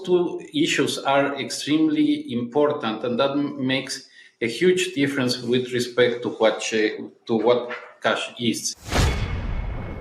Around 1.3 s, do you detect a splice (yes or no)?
no